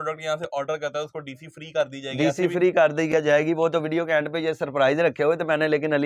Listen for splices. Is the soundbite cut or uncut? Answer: uncut